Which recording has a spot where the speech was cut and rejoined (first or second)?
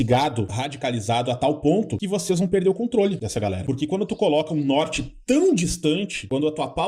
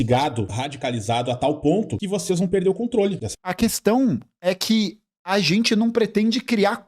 first